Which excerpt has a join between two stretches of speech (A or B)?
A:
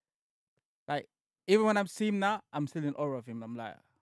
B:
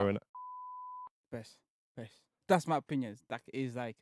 B